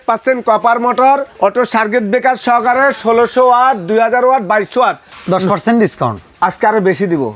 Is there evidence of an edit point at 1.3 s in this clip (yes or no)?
yes